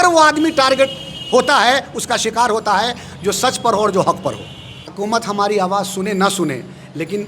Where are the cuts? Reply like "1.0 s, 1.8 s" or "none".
4.8 s

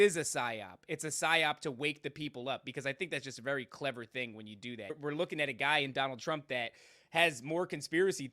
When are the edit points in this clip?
5.0 s

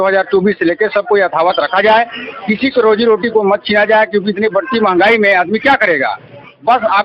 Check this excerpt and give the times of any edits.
none

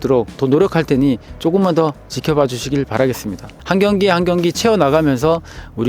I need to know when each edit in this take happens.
3.5 s

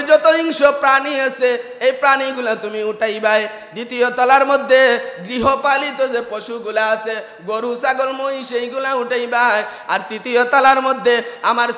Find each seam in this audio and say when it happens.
none

